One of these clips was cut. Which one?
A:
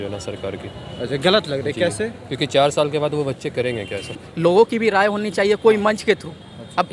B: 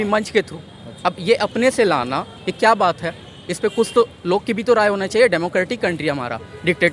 A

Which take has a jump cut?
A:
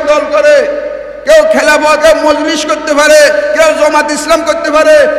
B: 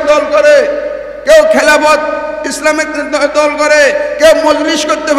A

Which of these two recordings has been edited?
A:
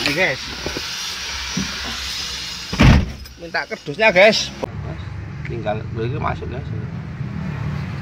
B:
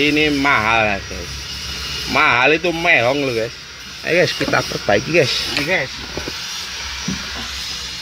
A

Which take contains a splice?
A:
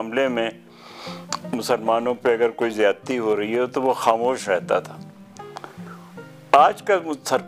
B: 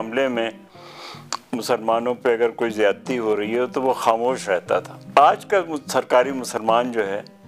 B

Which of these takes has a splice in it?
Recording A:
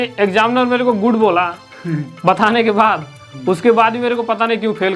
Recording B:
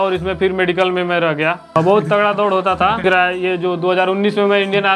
B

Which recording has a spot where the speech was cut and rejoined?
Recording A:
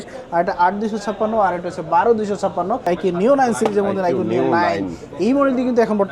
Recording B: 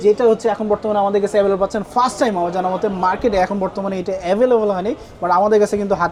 A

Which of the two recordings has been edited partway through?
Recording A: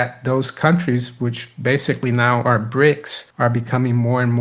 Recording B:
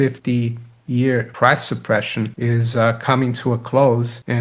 B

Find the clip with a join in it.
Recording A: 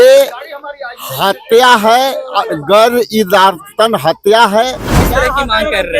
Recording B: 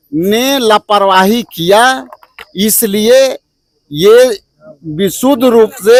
A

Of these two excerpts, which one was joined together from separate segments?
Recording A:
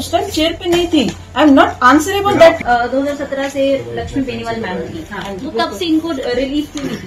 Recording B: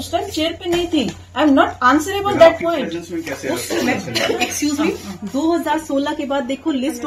A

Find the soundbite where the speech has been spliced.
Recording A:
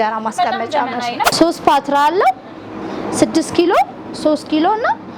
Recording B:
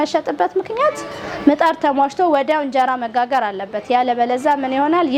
A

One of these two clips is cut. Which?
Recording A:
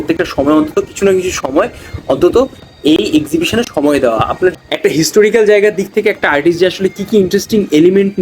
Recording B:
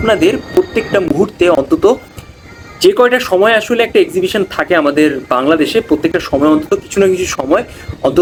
A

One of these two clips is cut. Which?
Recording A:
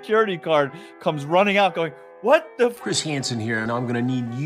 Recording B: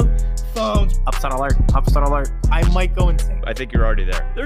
A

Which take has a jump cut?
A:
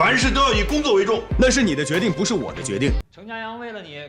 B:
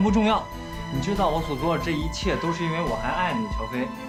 A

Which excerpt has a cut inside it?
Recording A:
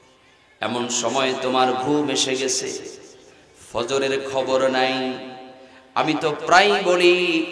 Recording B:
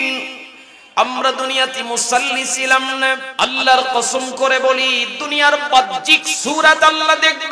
B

